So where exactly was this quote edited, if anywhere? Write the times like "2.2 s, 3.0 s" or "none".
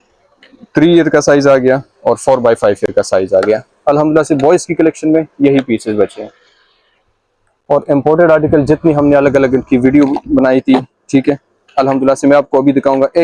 none